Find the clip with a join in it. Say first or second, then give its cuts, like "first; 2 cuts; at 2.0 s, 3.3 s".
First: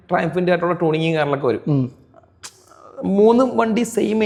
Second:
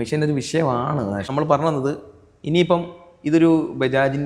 second; 1 cut; at 1.2 s